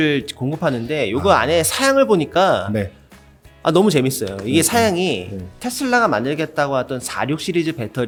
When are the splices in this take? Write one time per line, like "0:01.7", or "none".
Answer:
none